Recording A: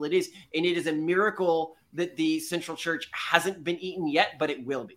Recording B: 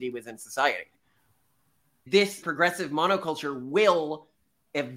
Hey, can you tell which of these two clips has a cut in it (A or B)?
B